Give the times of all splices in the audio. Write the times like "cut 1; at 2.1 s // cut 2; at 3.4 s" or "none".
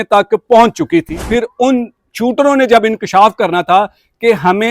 cut 1; at 1.2 s